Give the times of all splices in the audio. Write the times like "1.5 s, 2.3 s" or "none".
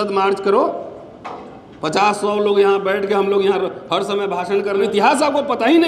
4.8 s